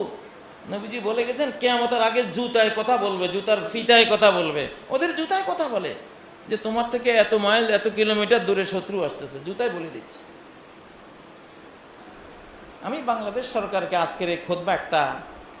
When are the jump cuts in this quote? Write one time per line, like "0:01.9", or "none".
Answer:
0:12.1